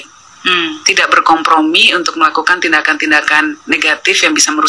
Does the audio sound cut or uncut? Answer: uncut